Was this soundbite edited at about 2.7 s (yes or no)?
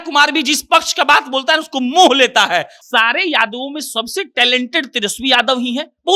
yes